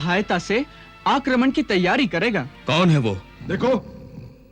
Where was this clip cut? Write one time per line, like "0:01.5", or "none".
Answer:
0:02.5
0:03.3